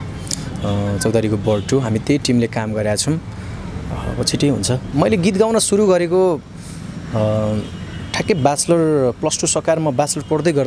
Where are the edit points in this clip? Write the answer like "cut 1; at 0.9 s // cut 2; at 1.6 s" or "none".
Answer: cut 1; at 4.8 s